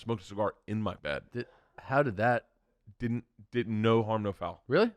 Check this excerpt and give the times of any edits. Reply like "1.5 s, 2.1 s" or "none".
1.0 s